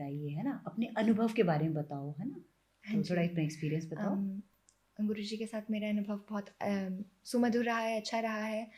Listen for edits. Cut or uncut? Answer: uncut